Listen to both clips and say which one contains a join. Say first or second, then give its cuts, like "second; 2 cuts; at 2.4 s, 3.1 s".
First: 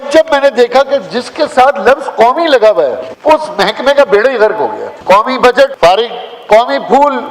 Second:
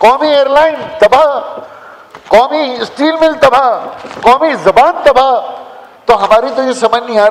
first; 3 cuts; at 3.1 s, 4.9 s, 5.7 s